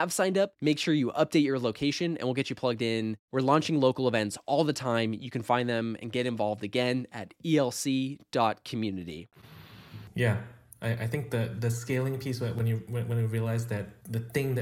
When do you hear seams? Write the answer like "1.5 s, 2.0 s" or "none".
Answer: none